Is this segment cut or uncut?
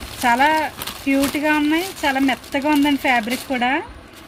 uncut